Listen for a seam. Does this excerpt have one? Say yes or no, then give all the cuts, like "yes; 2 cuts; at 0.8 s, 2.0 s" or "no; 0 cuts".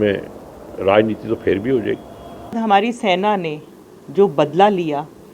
yes; 1 cut; at 2.6 s